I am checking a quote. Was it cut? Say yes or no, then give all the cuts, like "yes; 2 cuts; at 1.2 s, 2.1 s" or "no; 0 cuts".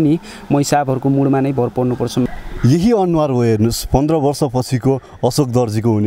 yes; 1 cut; at 2.3 s